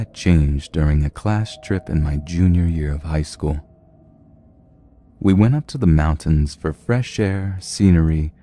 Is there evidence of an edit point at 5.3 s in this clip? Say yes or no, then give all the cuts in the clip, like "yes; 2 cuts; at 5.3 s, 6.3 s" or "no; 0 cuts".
yes; 1 cut; at 5.3 s